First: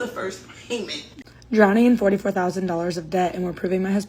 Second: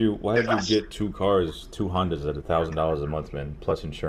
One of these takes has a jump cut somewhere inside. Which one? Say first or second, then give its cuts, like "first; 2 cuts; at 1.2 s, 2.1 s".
first; 1 cut; at 1.0 s